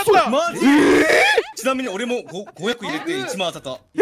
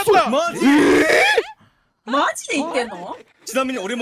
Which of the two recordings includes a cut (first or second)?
first